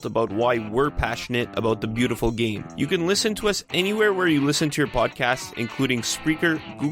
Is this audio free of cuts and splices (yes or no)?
yes